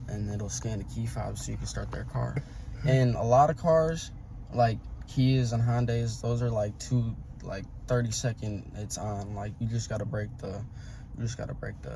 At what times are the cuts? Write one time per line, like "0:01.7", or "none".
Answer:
0:02.4